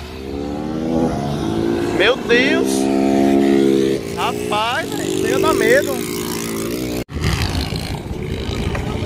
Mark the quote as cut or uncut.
uncut